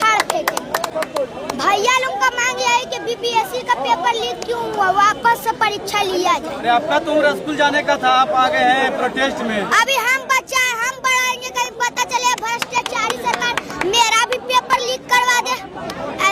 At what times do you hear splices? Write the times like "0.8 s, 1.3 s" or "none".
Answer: none

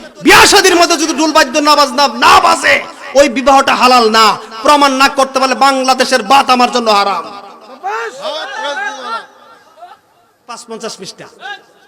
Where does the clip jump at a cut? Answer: 10.7 s

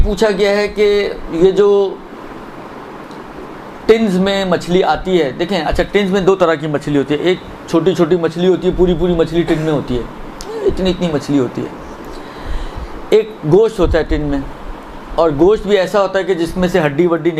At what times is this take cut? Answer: none

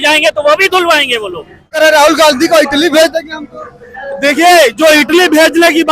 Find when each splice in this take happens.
1.7 s

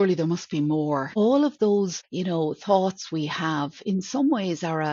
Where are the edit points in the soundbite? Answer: 1.1 s, 2.0 s

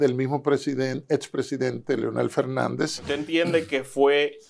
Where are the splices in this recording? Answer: 3.2 s

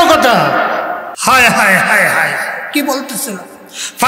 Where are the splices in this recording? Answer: 1.1 s

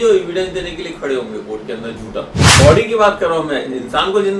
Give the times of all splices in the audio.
2.5 s

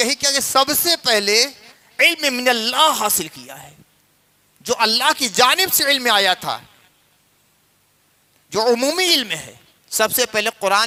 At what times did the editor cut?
none

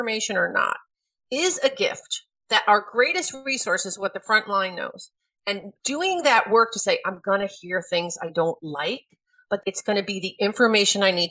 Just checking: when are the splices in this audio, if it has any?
2.3 s, 9.6 s

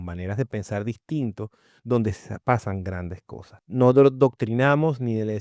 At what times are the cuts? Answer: 3.7 s

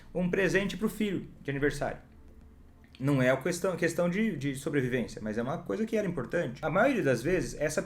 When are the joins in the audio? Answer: 6.6 s

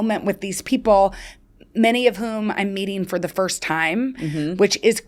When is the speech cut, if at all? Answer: none

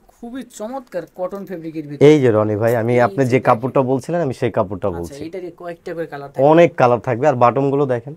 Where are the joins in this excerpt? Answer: none

